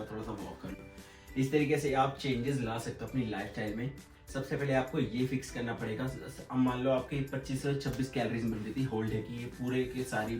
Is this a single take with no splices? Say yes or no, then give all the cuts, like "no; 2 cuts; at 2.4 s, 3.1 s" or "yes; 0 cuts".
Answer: yes; 0 cuts